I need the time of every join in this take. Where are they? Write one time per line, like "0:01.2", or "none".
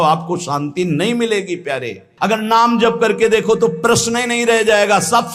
0:02.0